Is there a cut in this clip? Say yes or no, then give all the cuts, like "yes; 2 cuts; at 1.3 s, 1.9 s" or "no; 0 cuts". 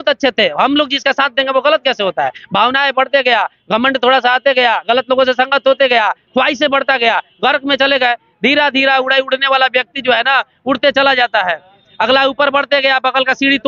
no; 0 cuts